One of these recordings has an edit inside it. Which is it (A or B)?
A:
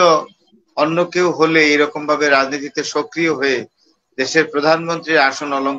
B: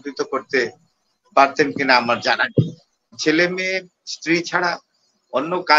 B